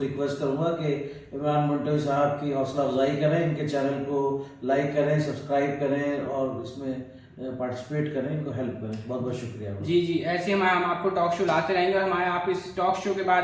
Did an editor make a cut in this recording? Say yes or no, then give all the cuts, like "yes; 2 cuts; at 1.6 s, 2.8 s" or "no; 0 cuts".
no; 0 cuts